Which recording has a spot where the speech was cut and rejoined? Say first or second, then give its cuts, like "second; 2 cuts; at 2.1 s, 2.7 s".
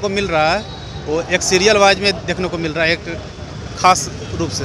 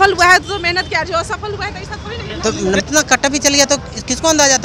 second; 1 cut; at 2.8 s